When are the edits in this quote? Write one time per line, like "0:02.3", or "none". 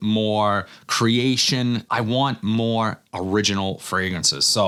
none